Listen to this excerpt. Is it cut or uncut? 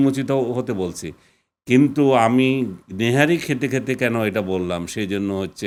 uncut